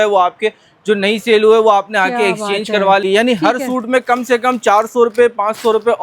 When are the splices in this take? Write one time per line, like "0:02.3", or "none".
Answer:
0:03.0